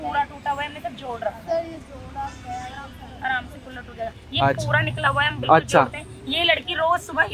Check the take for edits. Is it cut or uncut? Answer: uncut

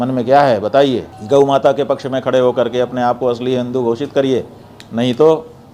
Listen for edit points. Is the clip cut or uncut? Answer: cut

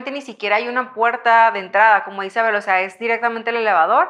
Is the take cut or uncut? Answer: uncut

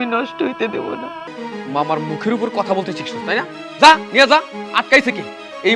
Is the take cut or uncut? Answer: cut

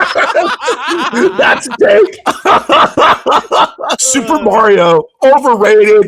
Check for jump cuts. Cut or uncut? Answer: cut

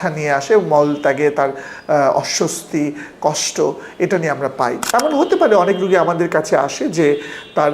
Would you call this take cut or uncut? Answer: cut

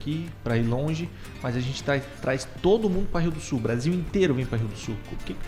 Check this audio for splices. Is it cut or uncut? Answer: uncut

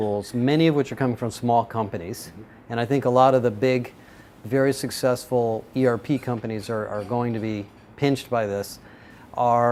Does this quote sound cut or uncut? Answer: uncut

